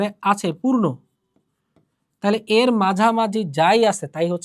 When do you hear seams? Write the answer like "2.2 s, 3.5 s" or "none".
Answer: none